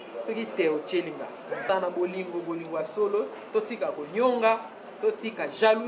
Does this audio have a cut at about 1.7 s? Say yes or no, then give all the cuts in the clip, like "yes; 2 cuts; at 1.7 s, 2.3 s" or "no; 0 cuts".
yes; 1 cut; at 1.7 s